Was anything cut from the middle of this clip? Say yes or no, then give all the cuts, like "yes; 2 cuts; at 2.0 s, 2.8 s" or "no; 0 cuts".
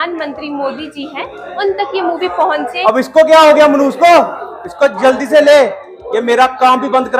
yes; 1 cut; at 2.8 s